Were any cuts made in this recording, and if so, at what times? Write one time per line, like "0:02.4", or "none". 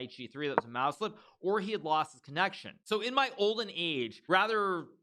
0:02.7
0:04.2